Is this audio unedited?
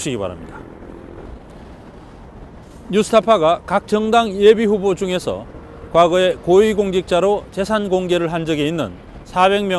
yes; 0 cuts

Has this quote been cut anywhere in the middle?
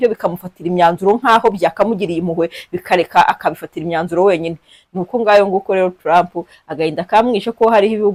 no; 0 cuts

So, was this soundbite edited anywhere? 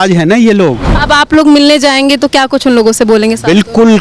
yes; 1 cut; at 0.9 s

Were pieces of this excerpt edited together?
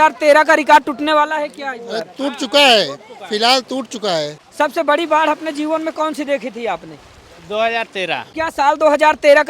yes; 2 cuts; at 4.4 s, 8.3 s

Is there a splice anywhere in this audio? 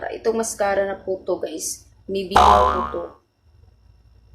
yes; 2 cuts; at 2.3 s, 2.9 s

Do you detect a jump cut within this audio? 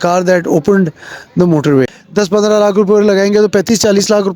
yes; 1 cut; at 2.0 s

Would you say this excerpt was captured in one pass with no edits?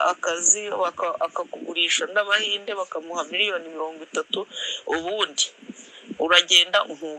yes; 0 cuts

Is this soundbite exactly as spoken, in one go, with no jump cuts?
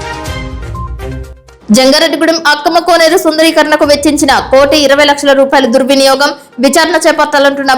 no; 1 cut; at 1.1 s

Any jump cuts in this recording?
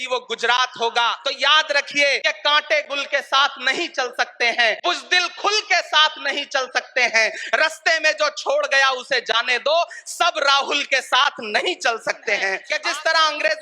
yes; 4 cuts; at 1.2 s, 2.2 s, 4.8 s, 12.6 s

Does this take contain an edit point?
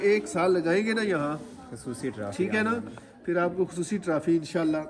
no; 0 cuts

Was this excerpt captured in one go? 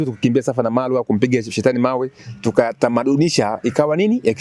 yes; 0 cuts

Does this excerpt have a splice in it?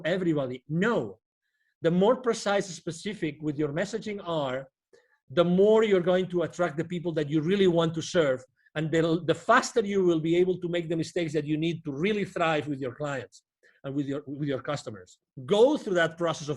yes; 1 cut; at 15.3 s

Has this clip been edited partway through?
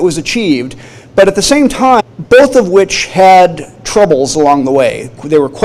no; 0 cuts

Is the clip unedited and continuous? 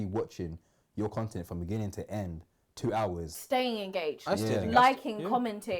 no; 1 cut; at 3.3 s

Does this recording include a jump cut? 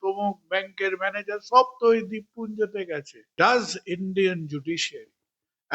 yes; 1 cut; at 3.3 s

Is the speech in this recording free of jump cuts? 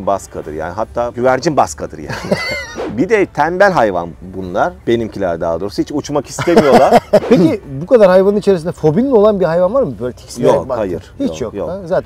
no; 3 cuts; at 1.1 s, 2.8 s, 7.2 s

